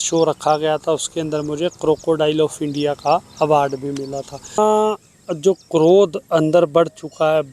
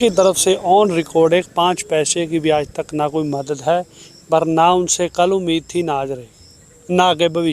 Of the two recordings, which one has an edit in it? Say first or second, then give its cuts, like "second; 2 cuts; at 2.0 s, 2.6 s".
first; 1 cut; at 4.6 s